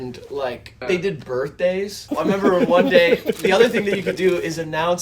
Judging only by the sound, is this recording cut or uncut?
cut